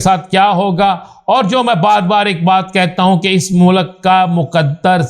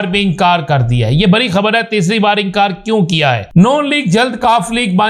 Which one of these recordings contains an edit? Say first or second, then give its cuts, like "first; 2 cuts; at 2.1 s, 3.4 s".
second; 1 cut; at 3.4 s